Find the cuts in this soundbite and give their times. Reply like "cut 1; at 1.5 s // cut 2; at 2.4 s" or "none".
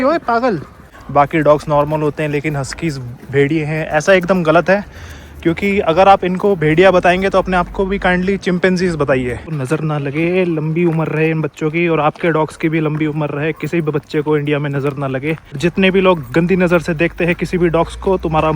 cut 1; at 0.9 s // cut 2; at 9.5 s // cut 3; at 15.6 s